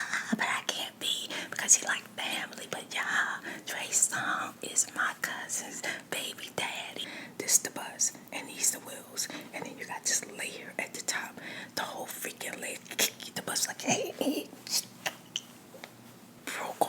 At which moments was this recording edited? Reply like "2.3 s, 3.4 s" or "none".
7.1 s